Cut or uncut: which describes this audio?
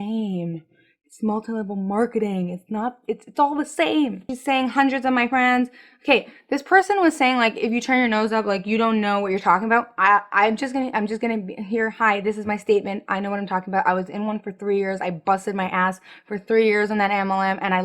cut